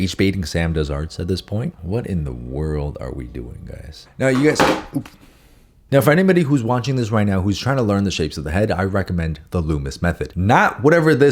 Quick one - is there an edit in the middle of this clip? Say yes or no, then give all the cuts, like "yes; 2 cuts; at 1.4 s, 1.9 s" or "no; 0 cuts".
no; 0 cuts